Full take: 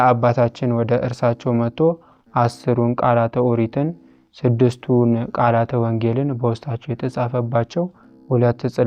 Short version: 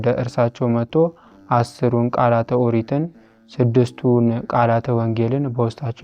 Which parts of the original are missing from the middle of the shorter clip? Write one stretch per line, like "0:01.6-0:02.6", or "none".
none